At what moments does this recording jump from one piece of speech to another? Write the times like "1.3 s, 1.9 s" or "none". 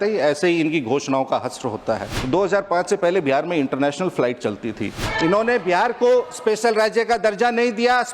2.1 s, 5.0 s